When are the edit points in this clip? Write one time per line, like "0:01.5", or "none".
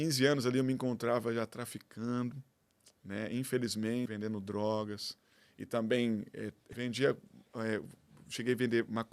0:04.0
0:06.7